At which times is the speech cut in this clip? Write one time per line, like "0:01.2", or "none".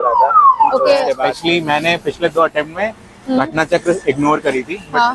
0:01.1

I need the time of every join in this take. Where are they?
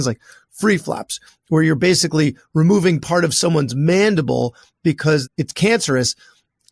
none

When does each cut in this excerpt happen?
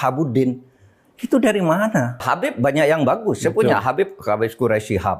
0:02.2

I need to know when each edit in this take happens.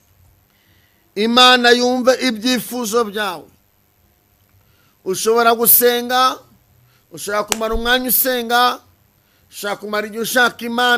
none

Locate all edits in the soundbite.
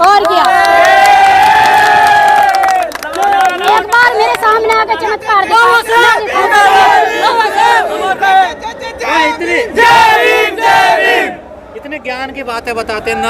none

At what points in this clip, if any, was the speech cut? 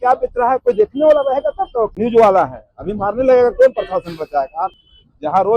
0:01.9
0:04.7

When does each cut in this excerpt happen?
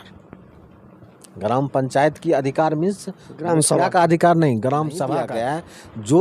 0:05.1

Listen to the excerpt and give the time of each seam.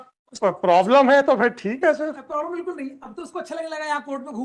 none

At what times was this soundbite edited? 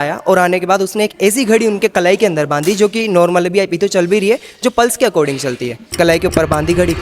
0:05.9

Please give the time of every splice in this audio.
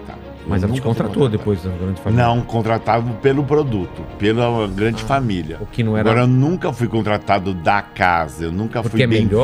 none

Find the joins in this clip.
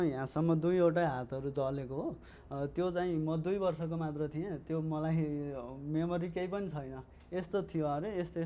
none

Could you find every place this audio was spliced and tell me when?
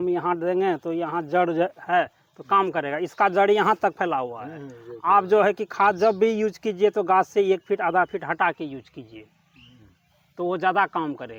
none

